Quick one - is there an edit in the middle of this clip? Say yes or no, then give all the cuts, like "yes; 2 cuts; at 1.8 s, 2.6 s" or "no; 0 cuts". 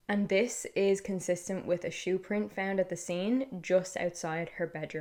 no; 0 cuts